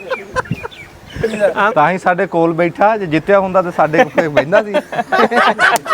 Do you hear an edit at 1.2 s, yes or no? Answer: yes